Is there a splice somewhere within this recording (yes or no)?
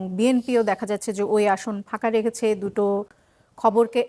no